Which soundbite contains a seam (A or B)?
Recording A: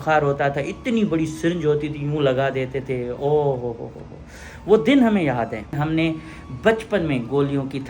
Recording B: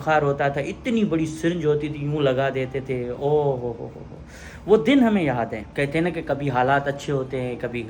A